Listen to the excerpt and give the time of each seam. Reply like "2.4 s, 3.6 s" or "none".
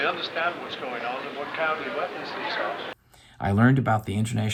none